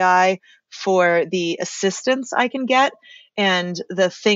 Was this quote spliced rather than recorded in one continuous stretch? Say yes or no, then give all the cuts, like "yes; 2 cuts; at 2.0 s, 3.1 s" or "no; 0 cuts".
no; 0 cuts